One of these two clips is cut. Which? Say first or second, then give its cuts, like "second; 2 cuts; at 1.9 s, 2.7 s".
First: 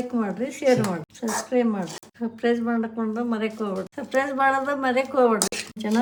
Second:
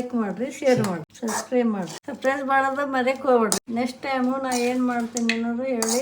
second; 2 cuts; at 2.0 s, 3.6 s